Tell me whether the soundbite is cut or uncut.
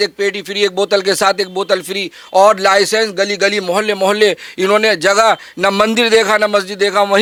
uncut